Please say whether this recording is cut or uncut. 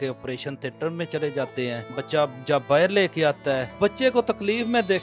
cut